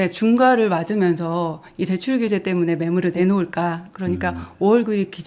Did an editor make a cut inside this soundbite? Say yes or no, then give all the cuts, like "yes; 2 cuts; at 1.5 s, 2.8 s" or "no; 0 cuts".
no; 0 cuts